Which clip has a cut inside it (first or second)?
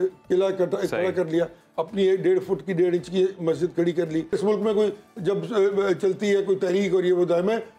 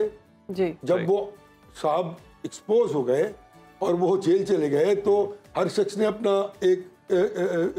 first